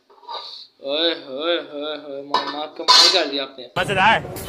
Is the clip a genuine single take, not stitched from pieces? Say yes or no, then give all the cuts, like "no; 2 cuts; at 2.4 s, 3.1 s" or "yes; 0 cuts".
no; 1 cut; at 3.6 s